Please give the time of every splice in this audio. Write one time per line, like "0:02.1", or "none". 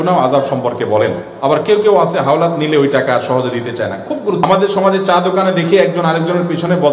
0:04.4